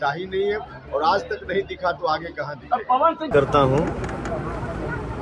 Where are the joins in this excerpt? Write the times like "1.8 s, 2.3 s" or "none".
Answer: 3.3 s

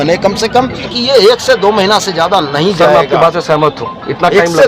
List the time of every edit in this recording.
0.9 s

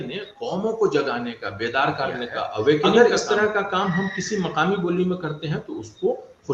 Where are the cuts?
2.9 s

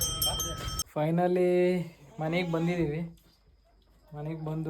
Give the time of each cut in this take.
0.9 s

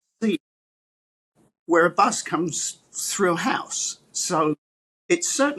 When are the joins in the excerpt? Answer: none

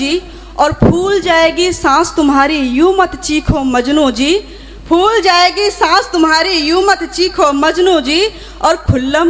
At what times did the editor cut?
none

